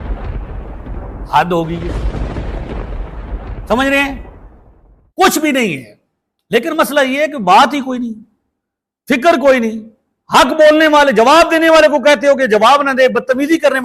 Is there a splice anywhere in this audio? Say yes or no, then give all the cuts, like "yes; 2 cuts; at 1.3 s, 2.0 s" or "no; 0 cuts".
no; 0 cuts